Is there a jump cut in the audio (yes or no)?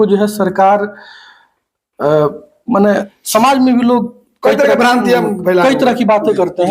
yes